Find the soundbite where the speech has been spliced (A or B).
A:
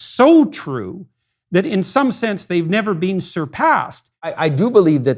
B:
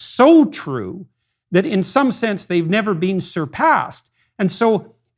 A